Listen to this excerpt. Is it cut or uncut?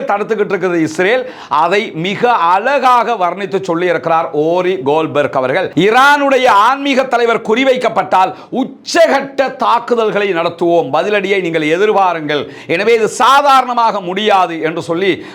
cut